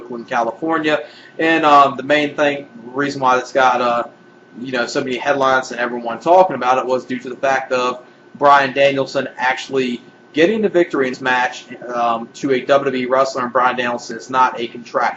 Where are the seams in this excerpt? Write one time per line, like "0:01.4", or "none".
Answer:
none